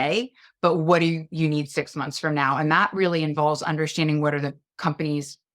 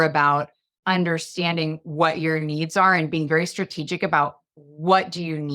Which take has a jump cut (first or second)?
second